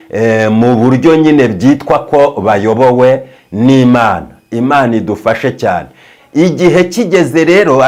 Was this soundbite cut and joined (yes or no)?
no